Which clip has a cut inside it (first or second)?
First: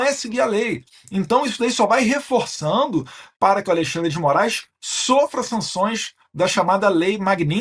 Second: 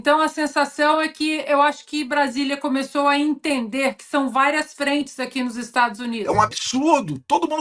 second